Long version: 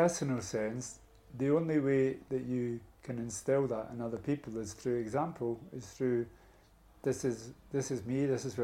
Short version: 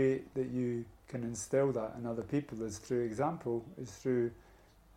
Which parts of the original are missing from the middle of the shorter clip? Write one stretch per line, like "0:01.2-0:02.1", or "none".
none